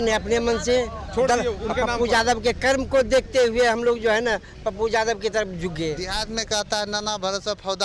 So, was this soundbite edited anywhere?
yes; 1 cut; at 6.1 s

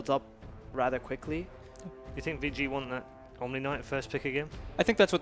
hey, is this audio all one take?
no; 1 cut; at 0.9 s

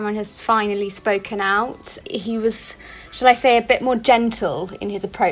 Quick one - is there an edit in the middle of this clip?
yes; 1 cut; at 2.0 s

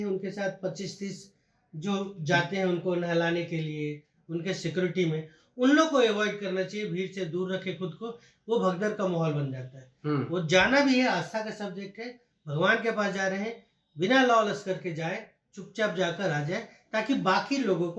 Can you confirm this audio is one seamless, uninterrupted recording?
yes; 0 cuts

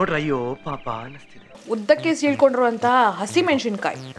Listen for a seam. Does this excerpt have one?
yes; 1 cut; at 1.5 s

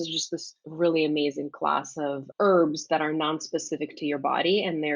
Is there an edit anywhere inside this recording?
yes; 1 cut; at 2.3 s

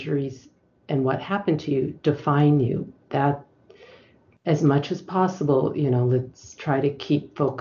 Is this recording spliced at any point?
no; 0 cuts

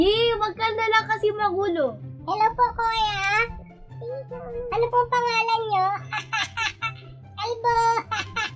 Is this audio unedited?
no; 1 cut; at 2.1 s

